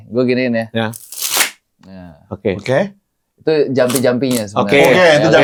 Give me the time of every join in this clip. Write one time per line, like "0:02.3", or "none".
none